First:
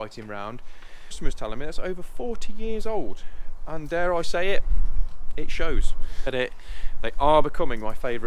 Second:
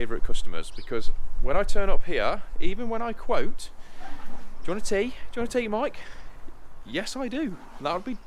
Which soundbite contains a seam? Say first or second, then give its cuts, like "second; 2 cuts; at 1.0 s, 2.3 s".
first; 2 cuts; at 1.2 s, 6.3 s